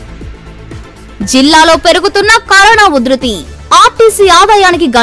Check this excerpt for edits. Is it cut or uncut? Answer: cut